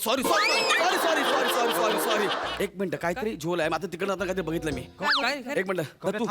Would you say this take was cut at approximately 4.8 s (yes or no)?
no